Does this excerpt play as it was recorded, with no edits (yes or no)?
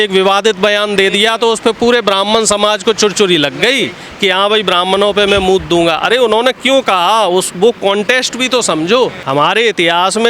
no